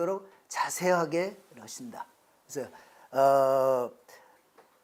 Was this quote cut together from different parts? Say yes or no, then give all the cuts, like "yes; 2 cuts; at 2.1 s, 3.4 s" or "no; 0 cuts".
no; 0 cuts